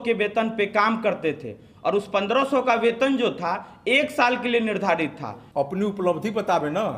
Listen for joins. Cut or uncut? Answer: cut